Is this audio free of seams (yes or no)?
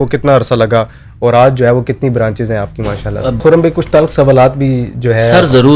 no